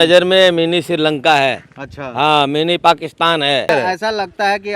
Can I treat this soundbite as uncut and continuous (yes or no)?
no